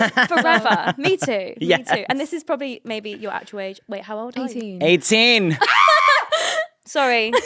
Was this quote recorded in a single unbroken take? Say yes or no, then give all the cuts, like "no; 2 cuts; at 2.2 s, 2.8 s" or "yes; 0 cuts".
yes; 0 cuts